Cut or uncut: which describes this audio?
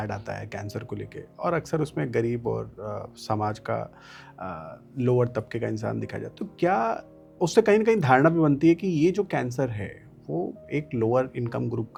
uncut